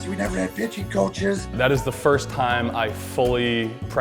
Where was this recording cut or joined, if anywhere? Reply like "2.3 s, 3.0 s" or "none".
1.5 s